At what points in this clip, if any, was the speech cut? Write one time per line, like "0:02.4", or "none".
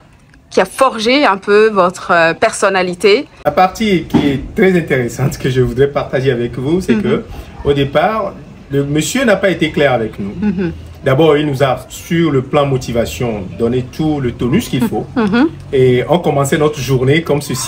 0:03.4

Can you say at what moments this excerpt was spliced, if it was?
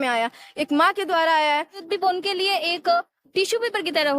0:01.8

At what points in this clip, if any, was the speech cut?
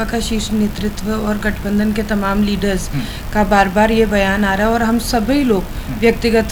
none

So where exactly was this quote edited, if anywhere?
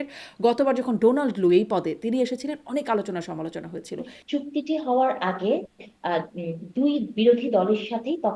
0:04.1

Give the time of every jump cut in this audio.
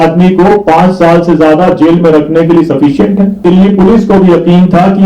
0:03.4

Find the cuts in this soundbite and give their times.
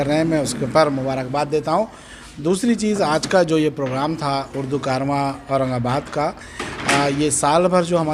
none

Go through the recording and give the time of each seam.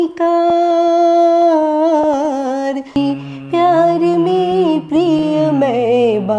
0:02.9

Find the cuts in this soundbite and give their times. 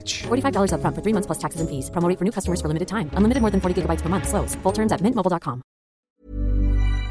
0:06.0

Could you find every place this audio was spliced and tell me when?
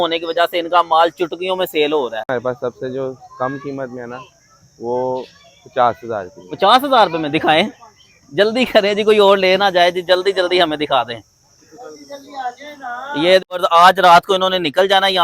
0:02.3
0:13.6

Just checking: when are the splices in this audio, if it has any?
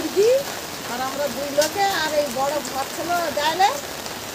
none

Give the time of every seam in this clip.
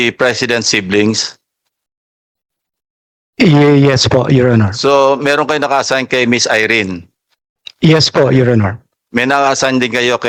none

